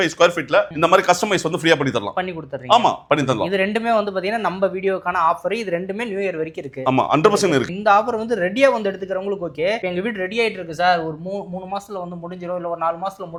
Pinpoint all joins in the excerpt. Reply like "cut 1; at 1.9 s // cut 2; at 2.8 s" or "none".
none